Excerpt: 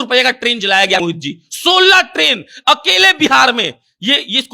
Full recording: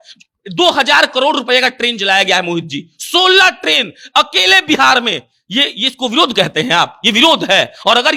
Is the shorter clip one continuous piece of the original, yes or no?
no